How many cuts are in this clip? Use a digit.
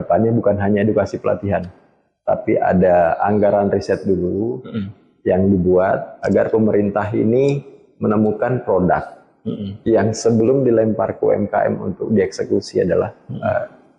0